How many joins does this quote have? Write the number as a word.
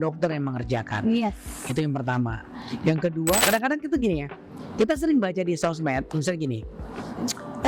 one